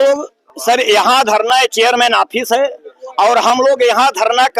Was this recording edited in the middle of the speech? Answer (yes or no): no